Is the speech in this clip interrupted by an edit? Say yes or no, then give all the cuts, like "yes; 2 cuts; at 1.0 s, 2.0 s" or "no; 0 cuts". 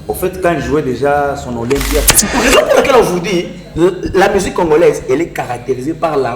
yes; 1 cut; at 2.2 s